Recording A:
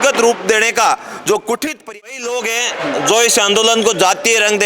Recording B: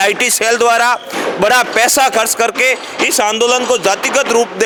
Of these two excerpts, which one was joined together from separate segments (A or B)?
A